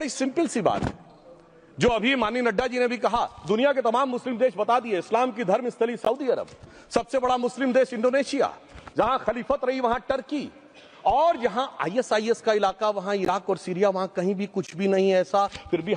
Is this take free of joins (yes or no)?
yes